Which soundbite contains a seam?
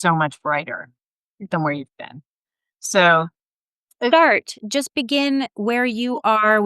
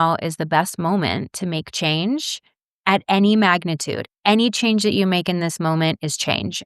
first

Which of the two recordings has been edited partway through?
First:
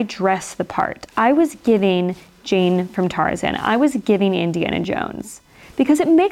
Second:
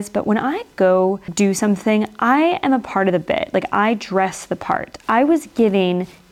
second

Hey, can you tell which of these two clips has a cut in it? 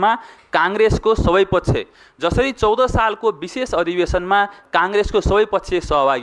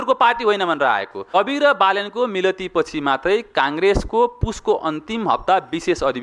second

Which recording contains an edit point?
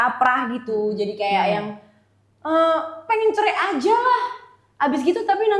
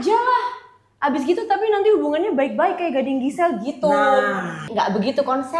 second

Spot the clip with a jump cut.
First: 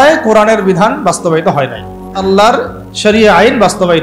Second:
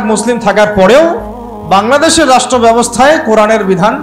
first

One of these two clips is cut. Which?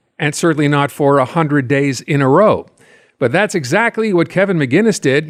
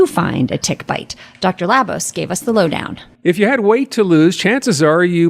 second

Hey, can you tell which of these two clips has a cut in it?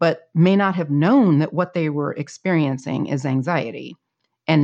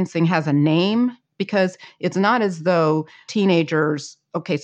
second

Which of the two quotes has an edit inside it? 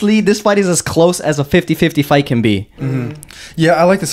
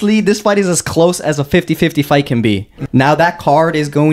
second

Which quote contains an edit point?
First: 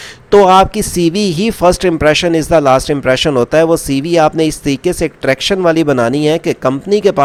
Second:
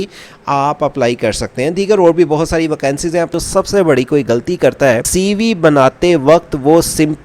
second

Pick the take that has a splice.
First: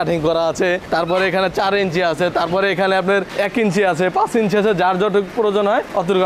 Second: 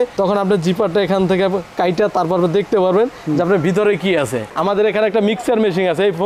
second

